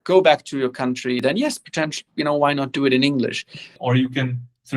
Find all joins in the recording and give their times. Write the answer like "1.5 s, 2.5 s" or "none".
1.2 s, 3.8 s